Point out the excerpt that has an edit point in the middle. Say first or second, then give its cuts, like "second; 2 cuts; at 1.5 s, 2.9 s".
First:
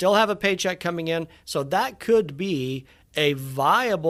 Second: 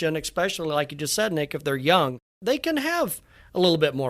second; 1 cut; at 2.4 s